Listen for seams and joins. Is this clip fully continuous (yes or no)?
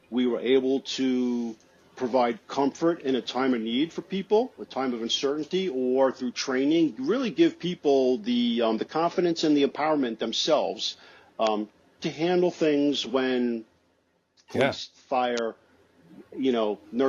yes